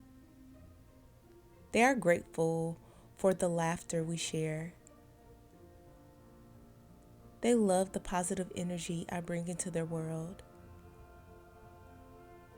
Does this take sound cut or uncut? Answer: uncut